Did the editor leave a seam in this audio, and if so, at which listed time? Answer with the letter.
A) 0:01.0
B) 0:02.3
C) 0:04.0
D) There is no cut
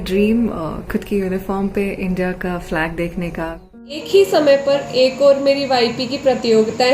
C